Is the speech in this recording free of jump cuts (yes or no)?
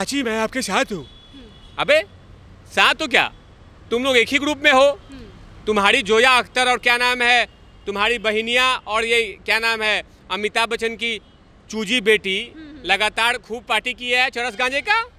yes